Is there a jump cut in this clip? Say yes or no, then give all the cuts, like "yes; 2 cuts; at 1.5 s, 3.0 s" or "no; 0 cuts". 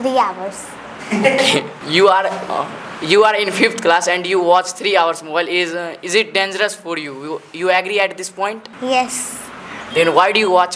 yes; 2 cuts; at 1.8 s, 8.7 s